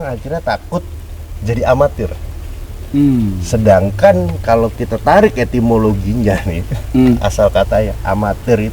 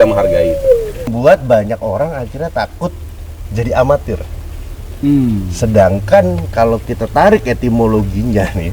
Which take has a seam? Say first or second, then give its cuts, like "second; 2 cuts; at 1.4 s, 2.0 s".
second; 1 cut; at 1.1 s